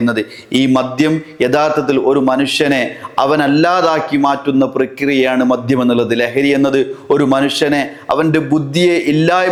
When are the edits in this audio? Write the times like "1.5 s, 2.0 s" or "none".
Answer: none

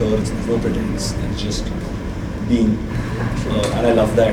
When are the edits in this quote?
none

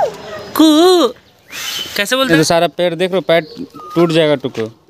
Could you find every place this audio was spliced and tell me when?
2.3 s

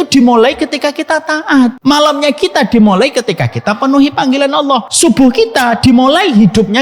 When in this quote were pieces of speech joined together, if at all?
1.8 s, 4.9 s

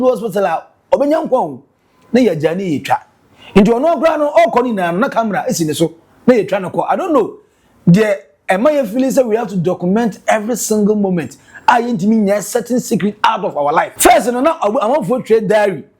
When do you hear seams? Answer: 13.9 s

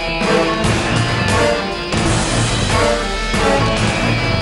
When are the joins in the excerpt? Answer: 1.8 s

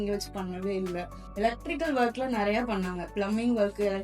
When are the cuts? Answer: 1.2 s

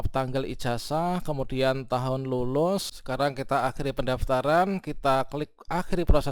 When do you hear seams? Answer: 3.0 s

